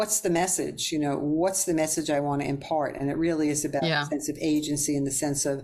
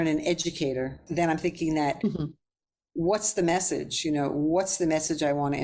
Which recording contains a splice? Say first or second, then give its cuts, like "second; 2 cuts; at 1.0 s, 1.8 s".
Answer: second; 1 cut; at 1.0 s